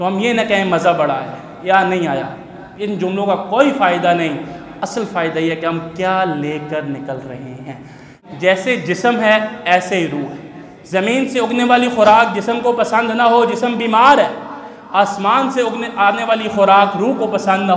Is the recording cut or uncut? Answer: cut